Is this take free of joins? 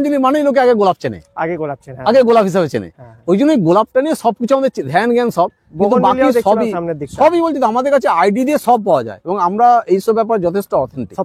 yes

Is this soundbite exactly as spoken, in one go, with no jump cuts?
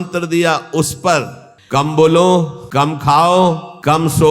no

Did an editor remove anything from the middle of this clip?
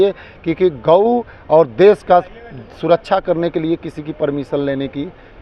no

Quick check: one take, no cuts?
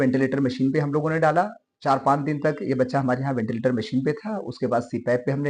yes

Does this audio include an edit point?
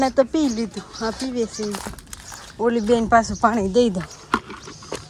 no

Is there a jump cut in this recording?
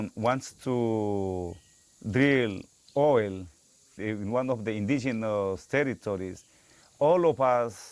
yes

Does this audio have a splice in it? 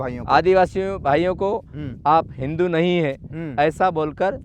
no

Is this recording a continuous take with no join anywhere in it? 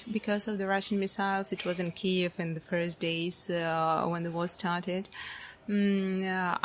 yes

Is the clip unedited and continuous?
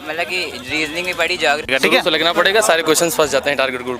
no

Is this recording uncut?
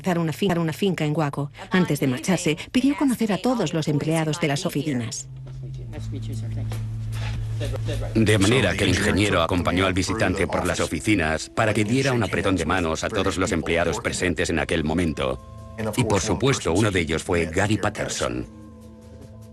yes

